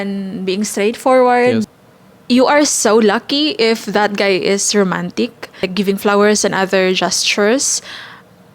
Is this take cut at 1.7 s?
yes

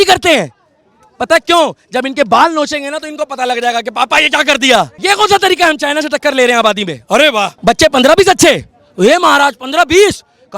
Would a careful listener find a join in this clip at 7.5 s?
yes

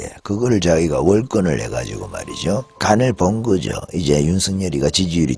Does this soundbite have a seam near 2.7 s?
yes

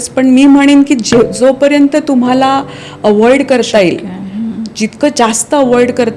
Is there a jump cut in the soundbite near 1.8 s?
no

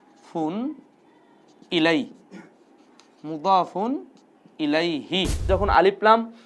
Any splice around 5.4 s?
yes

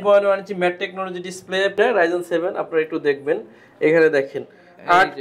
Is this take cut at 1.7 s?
yes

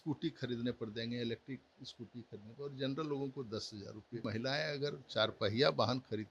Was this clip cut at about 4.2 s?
yes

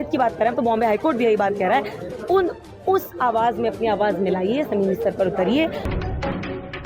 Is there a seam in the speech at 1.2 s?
no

